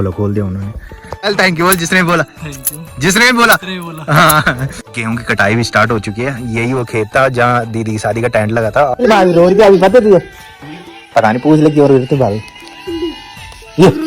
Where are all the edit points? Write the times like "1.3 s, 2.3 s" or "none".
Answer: 1.3 s, 4.8 s, 9.0 s